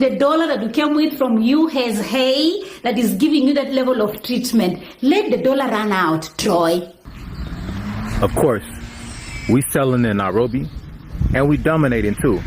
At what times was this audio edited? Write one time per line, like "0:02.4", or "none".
0:07.6